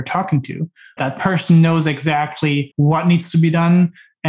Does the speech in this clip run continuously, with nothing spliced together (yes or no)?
no